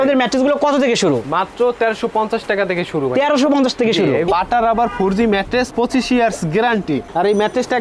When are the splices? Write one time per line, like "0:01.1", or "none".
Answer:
0:04.3